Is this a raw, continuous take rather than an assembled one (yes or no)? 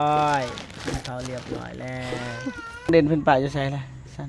no